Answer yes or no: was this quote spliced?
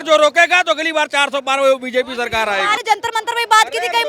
no